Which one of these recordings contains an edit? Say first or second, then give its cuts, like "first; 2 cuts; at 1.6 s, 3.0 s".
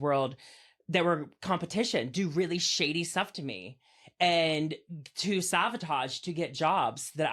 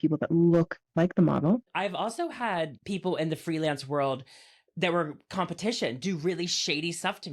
second; 2 cuts; at 1.7 s, 2.8 s